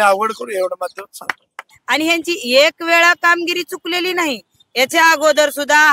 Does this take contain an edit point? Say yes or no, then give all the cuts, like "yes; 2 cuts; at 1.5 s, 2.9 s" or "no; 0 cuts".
yes; 1 cut; at 1.7 s